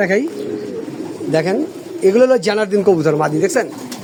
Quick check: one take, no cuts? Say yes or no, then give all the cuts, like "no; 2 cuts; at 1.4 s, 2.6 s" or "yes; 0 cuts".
yes; 0 cuts